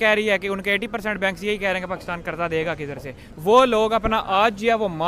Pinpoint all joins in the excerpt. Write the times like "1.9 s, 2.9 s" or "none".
3.3 s